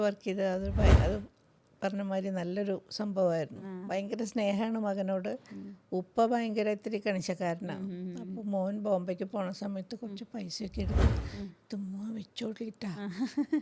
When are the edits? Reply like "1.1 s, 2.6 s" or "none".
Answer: none